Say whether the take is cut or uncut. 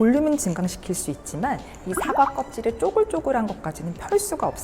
uncut